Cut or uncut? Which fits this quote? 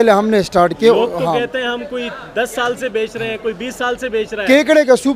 uncut